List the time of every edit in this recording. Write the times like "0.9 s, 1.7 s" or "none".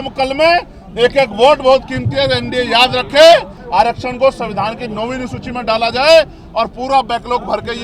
3.6 s